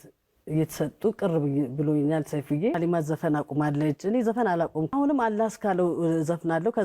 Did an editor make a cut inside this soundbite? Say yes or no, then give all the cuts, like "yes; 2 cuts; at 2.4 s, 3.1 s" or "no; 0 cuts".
yes; 2 cuts; at 2.8 s, 4.9 s